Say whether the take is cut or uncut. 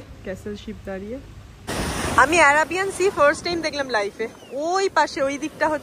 cut